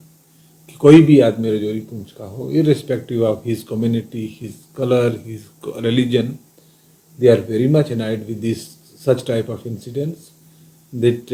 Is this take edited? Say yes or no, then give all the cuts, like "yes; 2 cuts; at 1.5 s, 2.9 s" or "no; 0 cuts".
no; 0 cuts